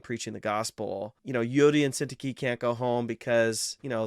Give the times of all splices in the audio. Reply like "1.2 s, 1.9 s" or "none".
1.2 s